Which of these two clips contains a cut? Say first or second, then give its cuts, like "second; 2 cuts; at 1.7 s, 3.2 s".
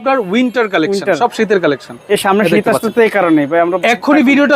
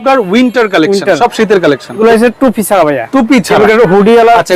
second; 1 cut; at 2.0 s